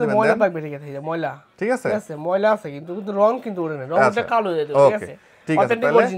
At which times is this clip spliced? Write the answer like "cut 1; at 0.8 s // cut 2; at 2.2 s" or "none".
none

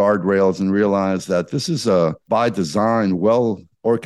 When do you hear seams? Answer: cut 1; at 2.2 s

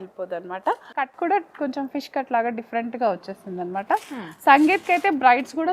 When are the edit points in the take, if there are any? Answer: cut 1; at 1.1 s

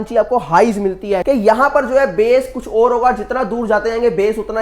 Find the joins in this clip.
cut 1; at 1.2 s

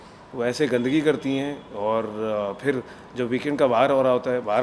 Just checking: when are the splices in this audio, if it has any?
none

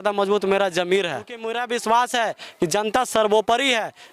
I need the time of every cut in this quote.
cut 1; at 1.6 s

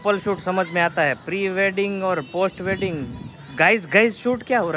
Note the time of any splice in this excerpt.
none

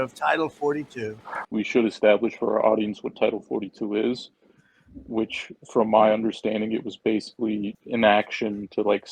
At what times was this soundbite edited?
cut 1; at 1.5 s // cut 2; at 7.8 s

